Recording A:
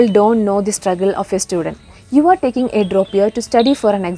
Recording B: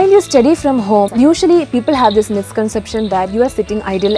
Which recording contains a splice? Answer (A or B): B